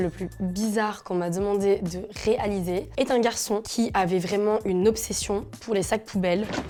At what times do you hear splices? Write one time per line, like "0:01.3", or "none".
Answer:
none